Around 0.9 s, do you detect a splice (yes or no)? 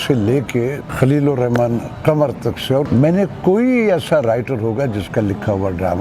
yes